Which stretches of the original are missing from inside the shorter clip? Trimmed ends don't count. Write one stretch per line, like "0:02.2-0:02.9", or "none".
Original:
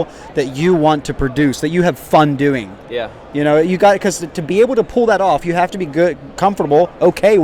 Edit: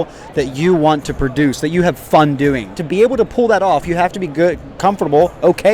0:02.7-0:04.3